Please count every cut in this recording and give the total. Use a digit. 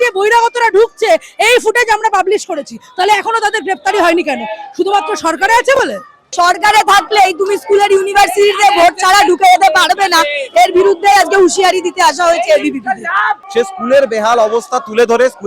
2